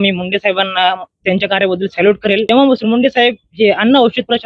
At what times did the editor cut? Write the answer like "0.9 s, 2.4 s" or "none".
2.5 s